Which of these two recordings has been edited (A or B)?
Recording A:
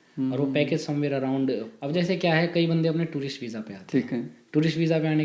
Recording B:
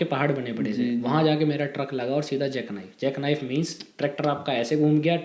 A